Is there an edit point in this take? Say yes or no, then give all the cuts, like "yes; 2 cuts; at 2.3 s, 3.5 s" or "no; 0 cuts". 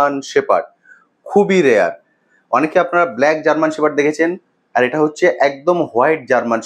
no; 0 cuts